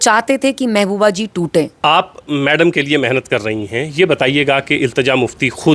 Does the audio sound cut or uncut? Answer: cut